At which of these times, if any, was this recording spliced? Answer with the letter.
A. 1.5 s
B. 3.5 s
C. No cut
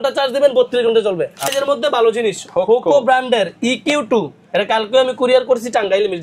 A